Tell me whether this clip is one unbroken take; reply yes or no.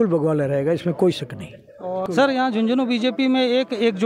no